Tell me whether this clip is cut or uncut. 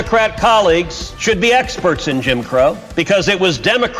cut